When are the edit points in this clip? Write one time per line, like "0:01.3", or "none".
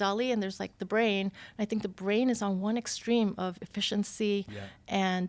none